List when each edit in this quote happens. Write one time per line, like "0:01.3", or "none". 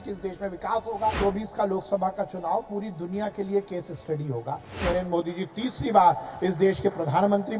0:01.2
0:04.8